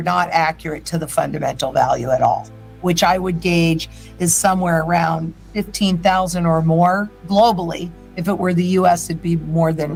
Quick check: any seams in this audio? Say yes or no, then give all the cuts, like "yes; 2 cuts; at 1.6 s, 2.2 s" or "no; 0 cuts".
no; 0 cuts